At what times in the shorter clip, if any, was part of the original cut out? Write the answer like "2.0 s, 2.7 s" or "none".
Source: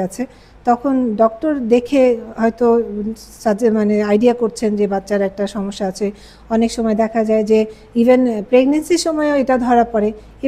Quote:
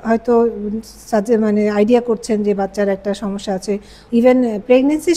4.0 s